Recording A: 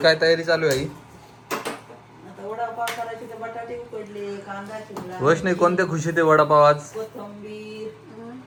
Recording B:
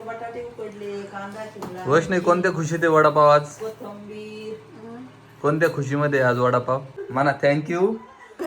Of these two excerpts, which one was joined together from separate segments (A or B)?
B